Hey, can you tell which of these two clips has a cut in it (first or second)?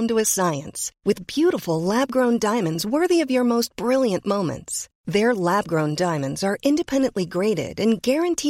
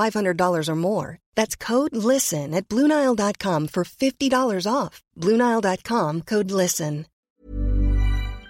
second